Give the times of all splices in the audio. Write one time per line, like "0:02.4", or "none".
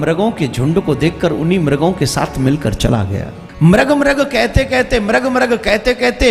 0:03.4

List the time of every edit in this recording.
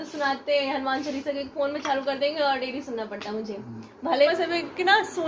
0:04.3

